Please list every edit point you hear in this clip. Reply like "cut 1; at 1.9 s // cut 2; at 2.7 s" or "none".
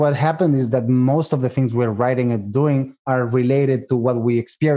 cut 1; at 2.9 s